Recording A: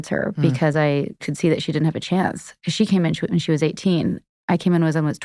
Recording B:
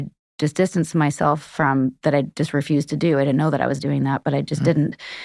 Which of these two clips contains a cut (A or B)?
A